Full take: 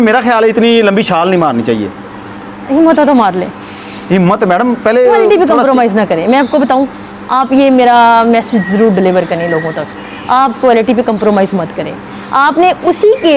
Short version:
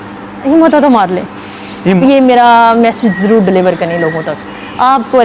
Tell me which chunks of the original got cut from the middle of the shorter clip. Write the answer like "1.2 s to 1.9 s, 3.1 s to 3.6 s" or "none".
4.2 s to 7.5 s